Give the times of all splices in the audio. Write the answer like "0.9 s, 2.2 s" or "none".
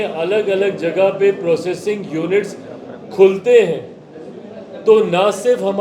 none